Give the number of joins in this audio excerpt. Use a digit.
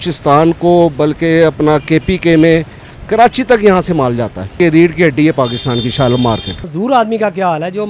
2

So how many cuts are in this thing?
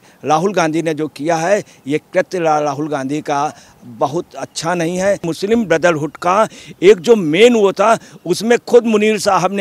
1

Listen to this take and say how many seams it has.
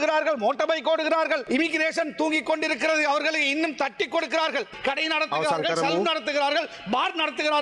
2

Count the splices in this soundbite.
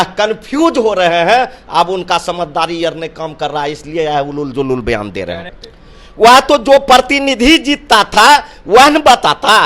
1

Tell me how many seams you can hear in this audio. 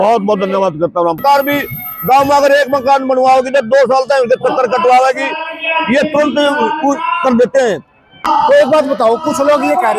2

